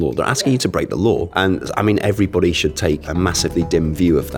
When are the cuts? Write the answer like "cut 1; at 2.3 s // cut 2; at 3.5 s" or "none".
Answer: cut 1; at 1.3 s // cut 2; at 3.1 s